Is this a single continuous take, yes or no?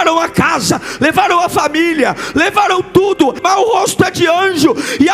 no